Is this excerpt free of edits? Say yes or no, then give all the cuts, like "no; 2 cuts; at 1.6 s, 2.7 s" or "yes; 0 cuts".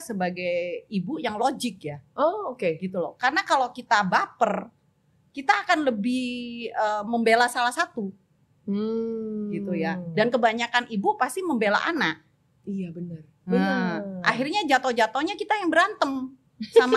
yes; 0 cuts